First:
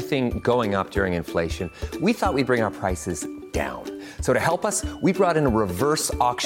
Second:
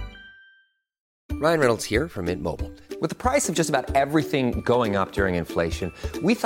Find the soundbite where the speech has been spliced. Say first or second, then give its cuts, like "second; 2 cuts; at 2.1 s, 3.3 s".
second; 1 cut; at 1.1 s